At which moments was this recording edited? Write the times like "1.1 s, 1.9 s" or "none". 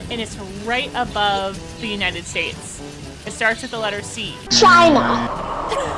4.4 s